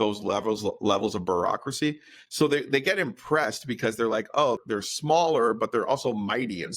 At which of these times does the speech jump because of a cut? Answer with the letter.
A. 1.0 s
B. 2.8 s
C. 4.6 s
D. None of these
C